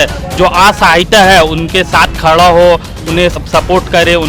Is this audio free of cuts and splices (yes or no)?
no